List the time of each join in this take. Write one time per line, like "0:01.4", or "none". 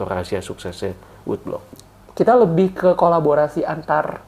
0:01.8